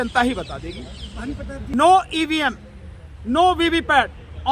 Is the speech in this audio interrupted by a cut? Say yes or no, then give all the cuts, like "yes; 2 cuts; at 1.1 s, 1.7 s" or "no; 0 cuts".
yes; 1 cut; at 1.7 s